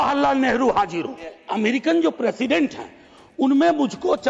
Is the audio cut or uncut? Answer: cut